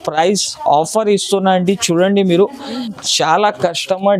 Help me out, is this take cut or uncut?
cut